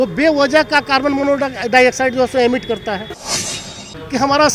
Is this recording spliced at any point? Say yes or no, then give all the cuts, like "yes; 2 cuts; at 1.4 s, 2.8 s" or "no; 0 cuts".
yes; 1 cut; at 3.6 s